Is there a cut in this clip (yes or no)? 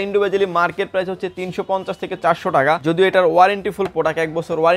yes